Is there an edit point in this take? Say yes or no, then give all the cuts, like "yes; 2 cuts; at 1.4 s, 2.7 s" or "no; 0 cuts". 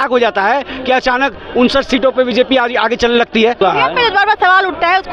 yes; 1 cut; at 3.6 s